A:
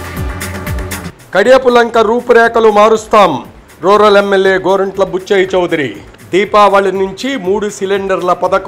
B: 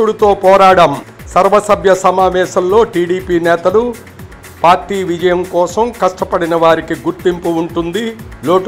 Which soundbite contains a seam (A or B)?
A